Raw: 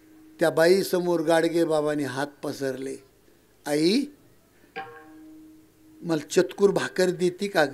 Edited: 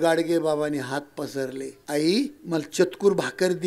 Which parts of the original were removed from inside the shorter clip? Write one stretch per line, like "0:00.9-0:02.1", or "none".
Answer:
0:03.0-0:03.5
0:04.2-0:06.0